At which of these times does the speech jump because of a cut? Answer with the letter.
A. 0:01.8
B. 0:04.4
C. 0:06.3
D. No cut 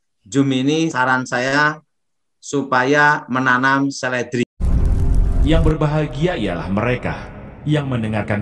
B